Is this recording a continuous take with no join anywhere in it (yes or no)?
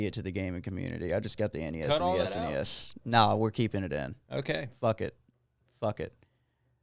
yes